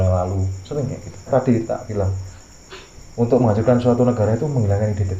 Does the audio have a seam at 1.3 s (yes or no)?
yes